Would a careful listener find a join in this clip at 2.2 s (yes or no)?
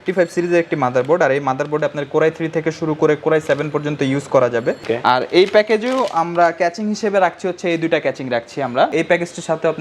no